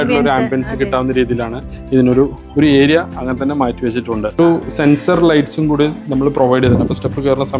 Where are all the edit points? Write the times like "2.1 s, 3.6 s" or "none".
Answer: 4.2 s